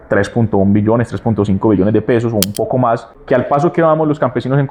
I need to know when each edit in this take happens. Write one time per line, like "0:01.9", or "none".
0:03.1